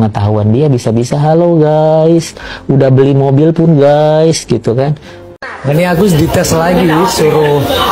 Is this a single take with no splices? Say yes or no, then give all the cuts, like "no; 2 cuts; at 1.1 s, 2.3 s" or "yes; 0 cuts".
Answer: no; 1 cut; at 5.3 s